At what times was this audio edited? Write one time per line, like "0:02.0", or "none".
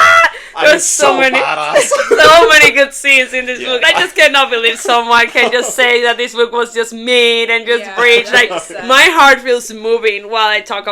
0:03.8